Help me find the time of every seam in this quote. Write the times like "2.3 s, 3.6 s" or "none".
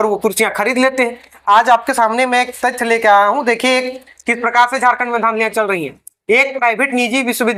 none

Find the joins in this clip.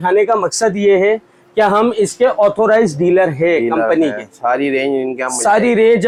none

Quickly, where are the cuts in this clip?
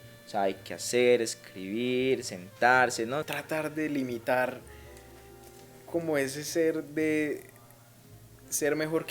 3.3 s

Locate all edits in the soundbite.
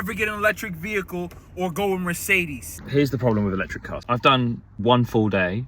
2.7 s

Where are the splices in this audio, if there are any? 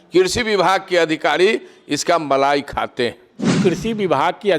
3.6 s

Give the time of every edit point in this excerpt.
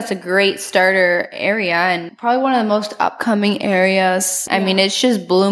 2.1 s, 4.4 s

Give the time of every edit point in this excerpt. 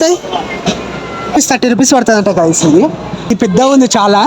1.4 s, 3.3 s

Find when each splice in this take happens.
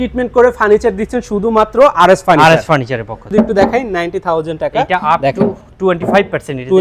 none

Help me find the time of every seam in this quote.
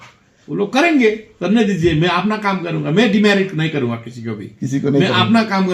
none

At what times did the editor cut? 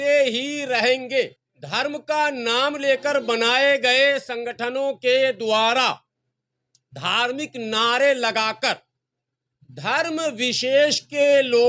1.3 s

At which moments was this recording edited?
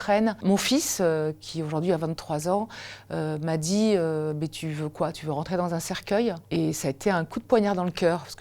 none

